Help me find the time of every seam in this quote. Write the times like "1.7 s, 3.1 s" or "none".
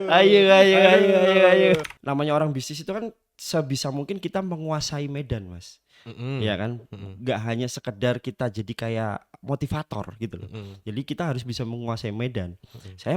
1.8 s